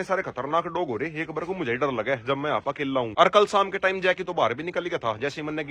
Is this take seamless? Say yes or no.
yes